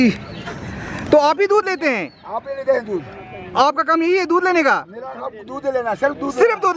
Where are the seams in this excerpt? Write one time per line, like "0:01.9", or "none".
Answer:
none